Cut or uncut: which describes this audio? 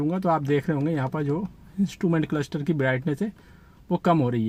uncut